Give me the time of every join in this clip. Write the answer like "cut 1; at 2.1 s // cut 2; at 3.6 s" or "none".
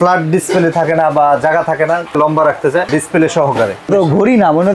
cut 1; at 2.2 s // cut 2; at 2.9 s // cut 3; at 3.9 s